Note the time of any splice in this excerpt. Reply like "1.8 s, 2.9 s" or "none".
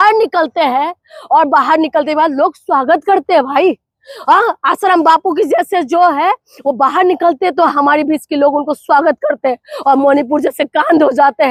none